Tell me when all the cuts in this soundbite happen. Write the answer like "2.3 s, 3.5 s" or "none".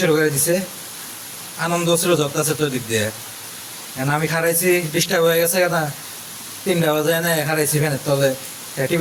none

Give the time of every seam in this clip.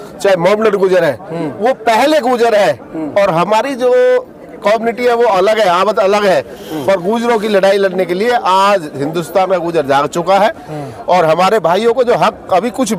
none

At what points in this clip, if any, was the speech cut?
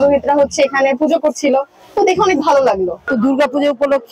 3.0 s

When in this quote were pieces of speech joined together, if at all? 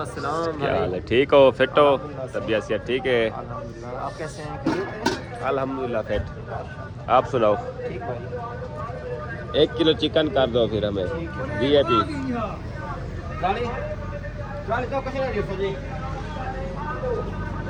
none

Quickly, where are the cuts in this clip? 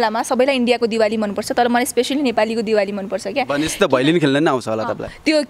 none

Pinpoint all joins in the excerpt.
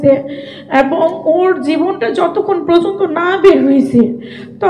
none

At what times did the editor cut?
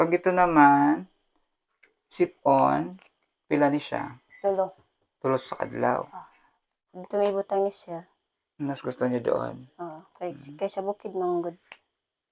6.9 s

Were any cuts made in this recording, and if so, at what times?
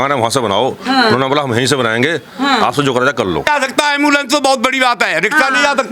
3.5 s

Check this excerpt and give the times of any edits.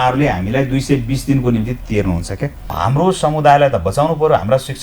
2.7 s

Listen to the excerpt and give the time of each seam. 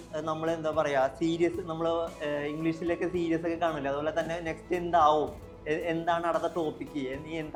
none

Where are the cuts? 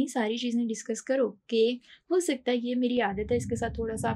none

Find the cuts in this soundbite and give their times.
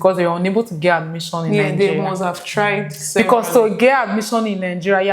none

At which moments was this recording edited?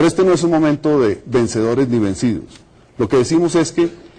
2.8 s

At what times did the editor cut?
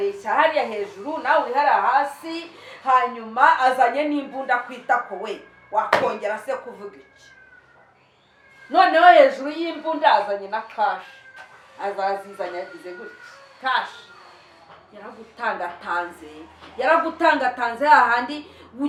none

